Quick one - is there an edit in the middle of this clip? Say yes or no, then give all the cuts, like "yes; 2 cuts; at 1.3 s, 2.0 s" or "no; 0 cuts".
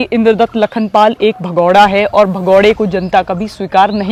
no; 0 cuts